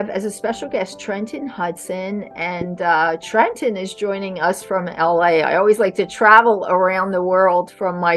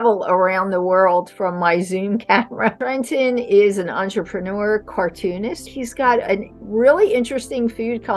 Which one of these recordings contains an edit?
second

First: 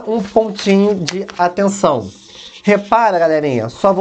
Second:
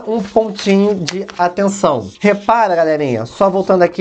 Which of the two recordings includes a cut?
second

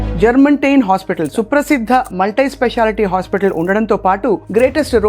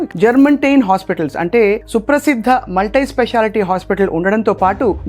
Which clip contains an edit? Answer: first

